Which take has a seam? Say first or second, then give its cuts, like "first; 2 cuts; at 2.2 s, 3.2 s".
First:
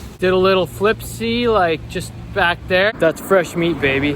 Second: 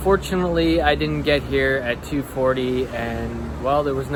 first; 1 cut; at 2.9 s